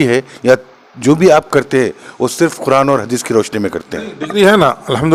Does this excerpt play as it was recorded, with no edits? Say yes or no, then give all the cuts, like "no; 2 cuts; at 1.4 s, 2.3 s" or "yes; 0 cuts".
yes; 0 cuts